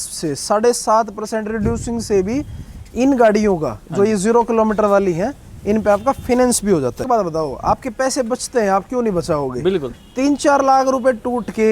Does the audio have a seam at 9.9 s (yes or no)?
yes